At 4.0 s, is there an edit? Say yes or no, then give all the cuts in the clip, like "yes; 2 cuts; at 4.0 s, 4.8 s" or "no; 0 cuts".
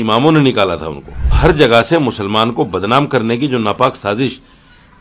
no; 1 cut; at 1.2 s